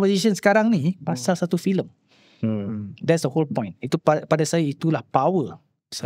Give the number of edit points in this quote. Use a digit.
0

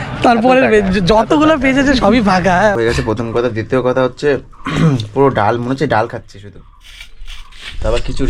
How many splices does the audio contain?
1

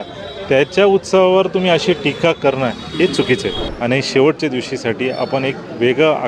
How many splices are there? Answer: 1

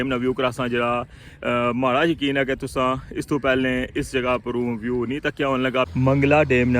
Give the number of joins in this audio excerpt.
1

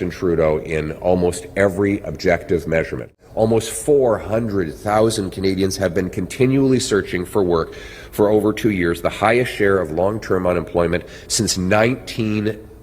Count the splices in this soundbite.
1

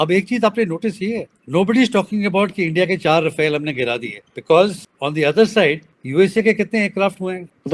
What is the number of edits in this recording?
0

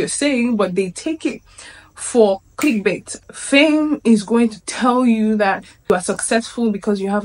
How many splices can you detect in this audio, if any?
1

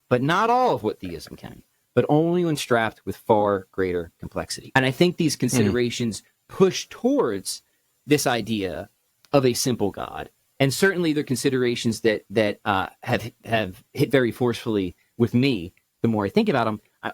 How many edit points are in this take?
1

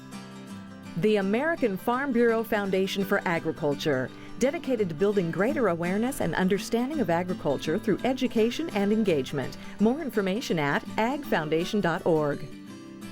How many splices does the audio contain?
1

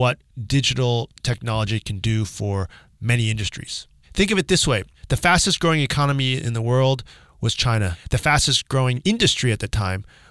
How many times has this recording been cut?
4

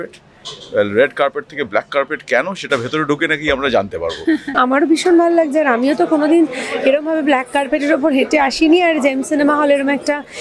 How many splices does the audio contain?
1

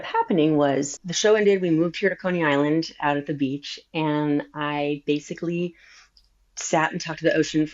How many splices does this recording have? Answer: 1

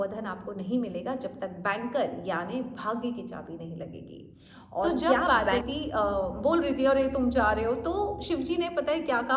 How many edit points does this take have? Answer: 1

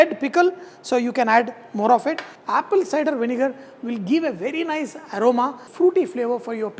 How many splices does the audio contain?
2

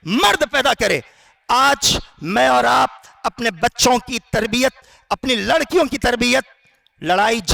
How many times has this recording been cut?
0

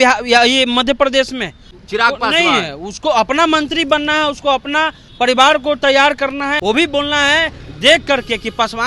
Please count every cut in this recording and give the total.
2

